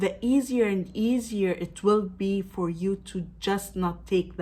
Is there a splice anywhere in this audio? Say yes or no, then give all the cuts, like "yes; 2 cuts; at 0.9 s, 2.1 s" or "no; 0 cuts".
no; 0 cuts